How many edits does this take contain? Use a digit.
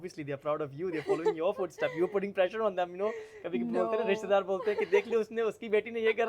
0